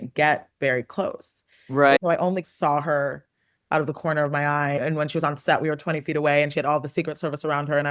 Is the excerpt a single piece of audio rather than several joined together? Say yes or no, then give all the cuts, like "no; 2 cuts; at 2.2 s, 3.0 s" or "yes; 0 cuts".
yes; 0 cuts